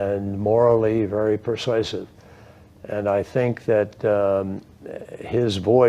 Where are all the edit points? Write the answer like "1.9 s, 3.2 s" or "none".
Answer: 2.3 s